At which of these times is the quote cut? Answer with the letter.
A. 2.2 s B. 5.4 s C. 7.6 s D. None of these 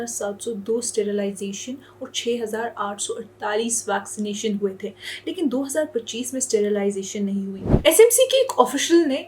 C